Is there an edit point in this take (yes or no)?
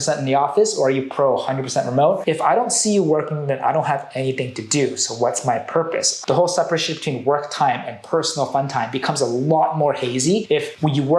yes